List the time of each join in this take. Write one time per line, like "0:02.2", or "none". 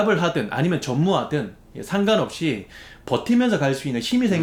none